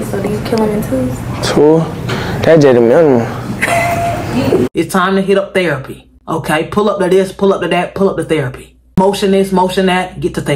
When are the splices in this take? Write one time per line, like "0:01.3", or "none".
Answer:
0:04.7